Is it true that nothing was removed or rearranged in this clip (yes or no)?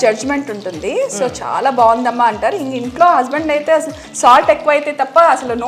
yes